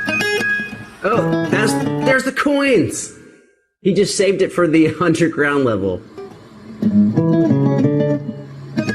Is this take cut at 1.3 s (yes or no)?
no